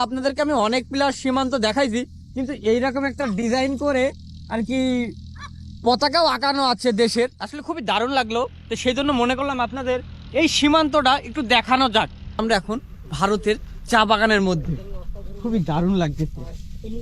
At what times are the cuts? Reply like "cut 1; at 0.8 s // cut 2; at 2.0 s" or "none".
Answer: cut 1; at 12.2 s